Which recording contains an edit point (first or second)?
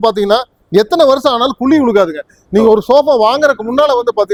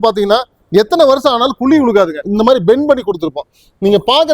second